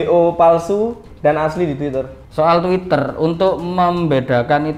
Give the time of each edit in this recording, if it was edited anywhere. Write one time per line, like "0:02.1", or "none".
0:02.1